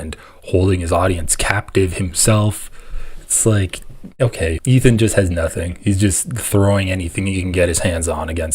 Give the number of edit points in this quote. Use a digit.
1